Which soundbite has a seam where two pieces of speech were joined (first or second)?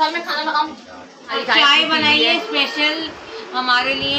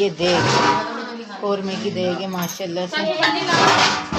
first